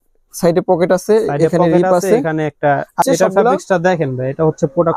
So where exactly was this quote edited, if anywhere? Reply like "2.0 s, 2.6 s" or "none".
3.0 s

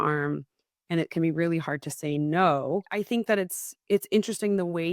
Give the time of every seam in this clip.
3.0 s

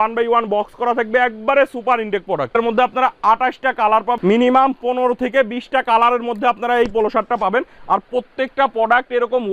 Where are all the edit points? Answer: 2.5 s, 4.2 s

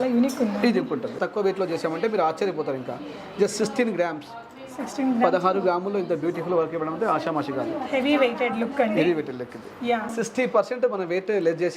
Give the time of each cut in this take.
1.2 s, 10.1 s

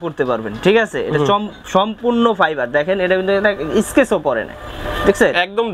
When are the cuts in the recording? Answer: none

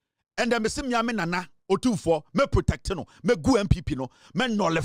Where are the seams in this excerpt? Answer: none

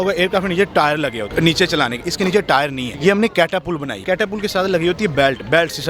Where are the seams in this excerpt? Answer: 1.2 s, 2.9 s, 4.0 s

